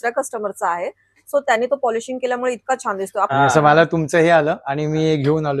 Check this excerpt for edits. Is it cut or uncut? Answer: cut